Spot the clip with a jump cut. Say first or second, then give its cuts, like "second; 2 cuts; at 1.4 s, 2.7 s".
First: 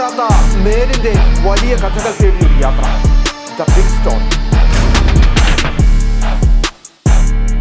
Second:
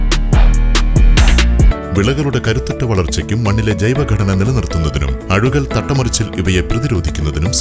second; 1 cut; at 1.8 s